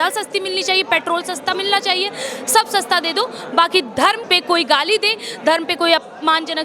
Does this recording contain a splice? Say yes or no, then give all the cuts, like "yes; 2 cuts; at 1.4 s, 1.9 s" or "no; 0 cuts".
yes; 1 cut; at 4.2 s